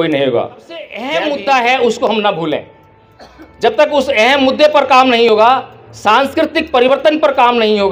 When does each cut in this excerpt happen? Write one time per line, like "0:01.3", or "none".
0:01.0

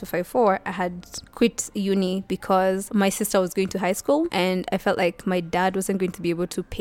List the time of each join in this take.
none

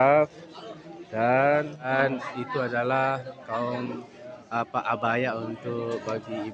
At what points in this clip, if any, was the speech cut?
0:01.9

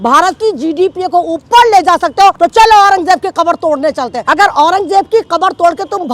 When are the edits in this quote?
0:02.4
0:04.2

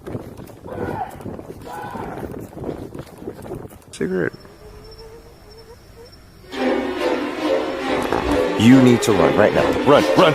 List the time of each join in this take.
0:03.9

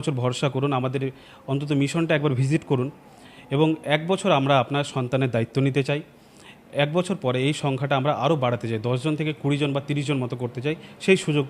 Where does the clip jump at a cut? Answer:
none

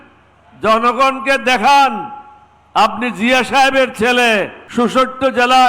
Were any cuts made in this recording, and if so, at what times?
0:04.6

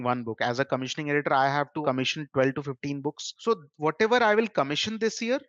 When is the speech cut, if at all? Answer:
0:01.8
0:03.3

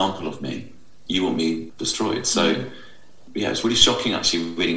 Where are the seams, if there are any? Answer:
0:00.9
0:01.7
0:03.2

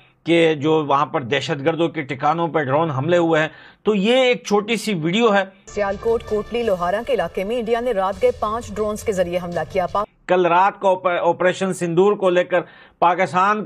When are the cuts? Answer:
none

